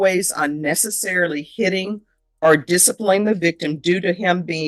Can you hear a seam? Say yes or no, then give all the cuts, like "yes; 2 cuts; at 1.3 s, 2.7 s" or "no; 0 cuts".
no; 0 cuts